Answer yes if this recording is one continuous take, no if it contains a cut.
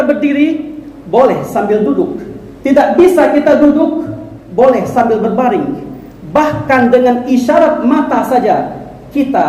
yes